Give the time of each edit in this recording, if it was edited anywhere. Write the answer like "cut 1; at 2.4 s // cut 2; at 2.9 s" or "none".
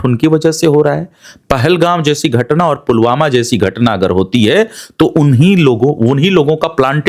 none